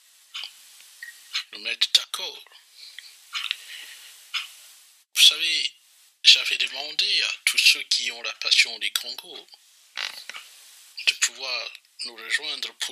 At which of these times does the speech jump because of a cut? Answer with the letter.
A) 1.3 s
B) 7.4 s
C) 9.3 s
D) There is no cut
C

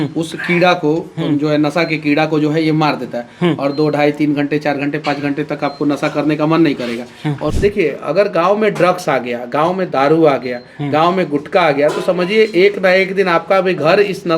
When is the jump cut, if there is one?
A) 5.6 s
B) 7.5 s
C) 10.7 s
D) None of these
B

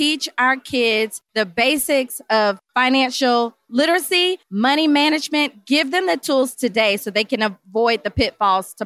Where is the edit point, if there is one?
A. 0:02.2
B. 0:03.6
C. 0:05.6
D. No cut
D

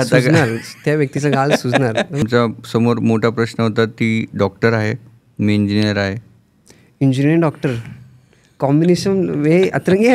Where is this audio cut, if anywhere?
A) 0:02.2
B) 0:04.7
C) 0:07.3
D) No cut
A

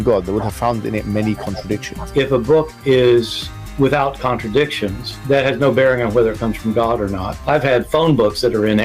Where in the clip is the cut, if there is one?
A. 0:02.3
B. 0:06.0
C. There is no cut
A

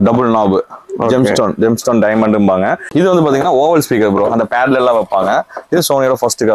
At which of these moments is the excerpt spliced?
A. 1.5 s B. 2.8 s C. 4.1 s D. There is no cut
B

